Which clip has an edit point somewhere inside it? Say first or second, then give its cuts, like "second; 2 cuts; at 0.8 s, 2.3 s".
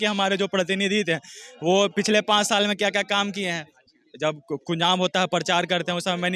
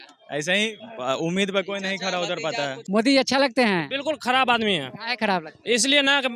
second; 1 cut; at 2.8 s